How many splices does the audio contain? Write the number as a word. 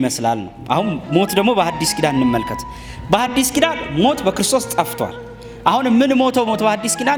zero